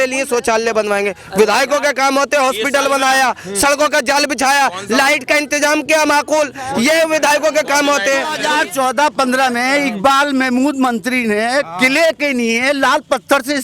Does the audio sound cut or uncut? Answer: cut